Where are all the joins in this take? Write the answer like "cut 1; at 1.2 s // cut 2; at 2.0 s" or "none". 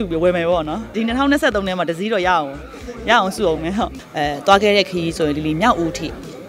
cut 1; at 0.9 s // cut 2; at 4.0 s